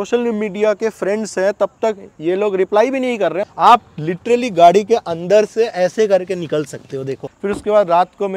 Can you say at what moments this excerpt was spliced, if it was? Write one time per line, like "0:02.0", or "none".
0:03.5
0:07.3